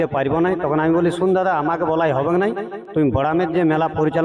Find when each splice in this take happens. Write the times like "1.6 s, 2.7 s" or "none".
none